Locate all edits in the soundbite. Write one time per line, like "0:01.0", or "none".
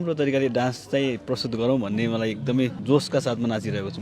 0:02.8